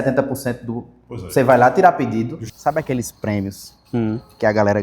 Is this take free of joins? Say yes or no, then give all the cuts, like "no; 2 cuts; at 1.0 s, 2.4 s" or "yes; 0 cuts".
no; 1 cut; at 2.4 s